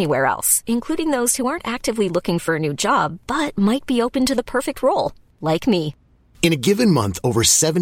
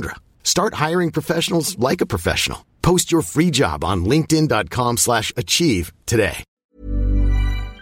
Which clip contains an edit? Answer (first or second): second